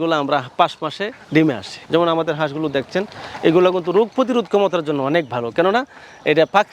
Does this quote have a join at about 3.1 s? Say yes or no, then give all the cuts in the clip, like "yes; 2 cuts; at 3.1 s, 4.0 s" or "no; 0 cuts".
no; 1 cut; at 1.7 s